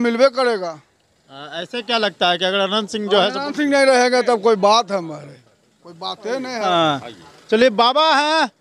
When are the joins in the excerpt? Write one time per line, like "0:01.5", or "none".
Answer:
none

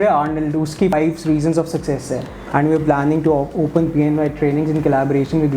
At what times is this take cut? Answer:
0:00.9
0:02.3

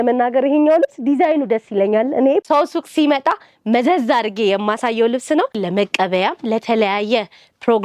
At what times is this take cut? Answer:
0:02.5
0:05.6

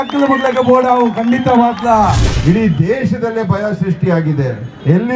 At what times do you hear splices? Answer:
0:02.2

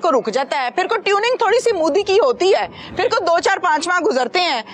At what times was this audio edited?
none

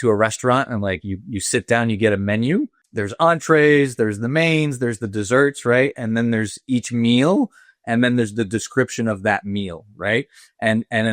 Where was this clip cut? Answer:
0:02.8

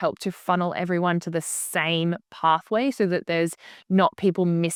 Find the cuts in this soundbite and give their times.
none

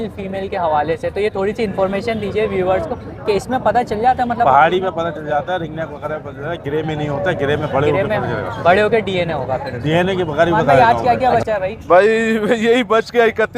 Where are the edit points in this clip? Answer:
0:10.8

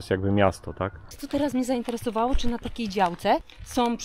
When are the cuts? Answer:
0:01.2

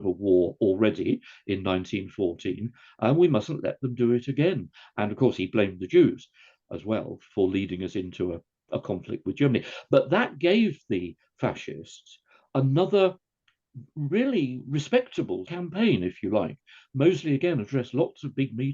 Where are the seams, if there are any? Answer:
0:07.2
0:15.5

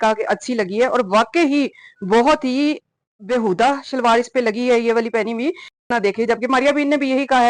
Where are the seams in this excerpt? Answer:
0:05.9

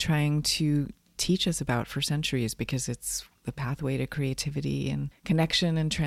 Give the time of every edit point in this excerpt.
none

